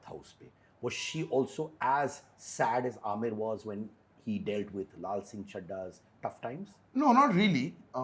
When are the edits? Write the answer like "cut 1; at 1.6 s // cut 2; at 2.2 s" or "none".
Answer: none